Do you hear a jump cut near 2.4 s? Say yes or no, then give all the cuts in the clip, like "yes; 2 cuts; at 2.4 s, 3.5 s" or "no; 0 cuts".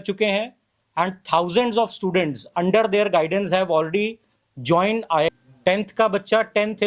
no; 1 cut; at 5.3 s